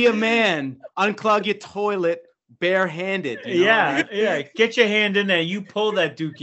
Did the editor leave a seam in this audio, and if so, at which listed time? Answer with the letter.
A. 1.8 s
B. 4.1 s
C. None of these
B